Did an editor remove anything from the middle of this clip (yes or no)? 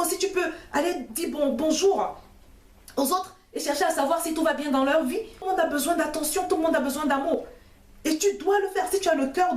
yes